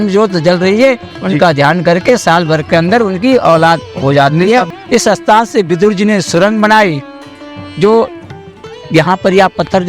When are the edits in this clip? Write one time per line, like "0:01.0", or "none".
0:04.7

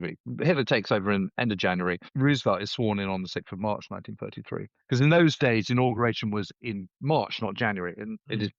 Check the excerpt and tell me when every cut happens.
0:02.1

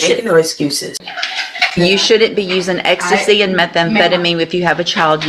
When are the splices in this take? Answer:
0:01.0

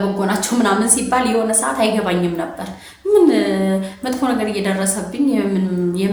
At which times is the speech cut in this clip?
none

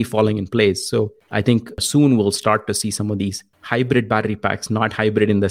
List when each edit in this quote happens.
0:01.7
0:03.5

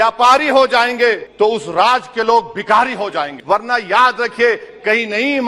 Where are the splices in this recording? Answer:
0:01.3
0:03.3

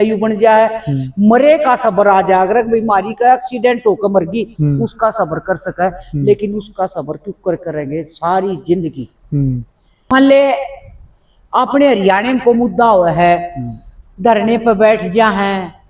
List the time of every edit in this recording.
0:10.1

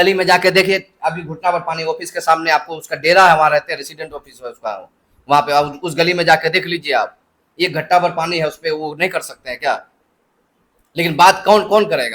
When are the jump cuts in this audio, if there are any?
none

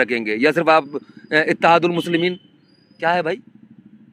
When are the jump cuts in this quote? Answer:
none

